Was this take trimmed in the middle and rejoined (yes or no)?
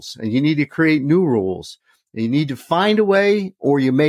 no